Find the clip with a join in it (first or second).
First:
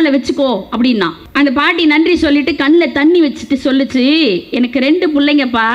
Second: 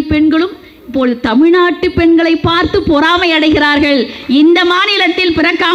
first